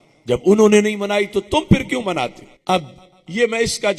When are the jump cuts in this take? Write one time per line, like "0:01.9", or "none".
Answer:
0:02.5